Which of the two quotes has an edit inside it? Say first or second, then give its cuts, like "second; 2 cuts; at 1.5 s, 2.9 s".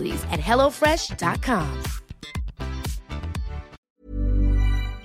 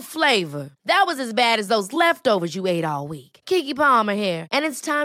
first; 1 cut; at 3.8 s